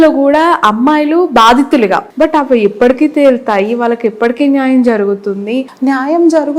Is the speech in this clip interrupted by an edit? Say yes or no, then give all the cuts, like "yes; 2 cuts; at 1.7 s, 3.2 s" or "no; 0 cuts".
yes; 2 cuts; at 2.1 s, 5.7 s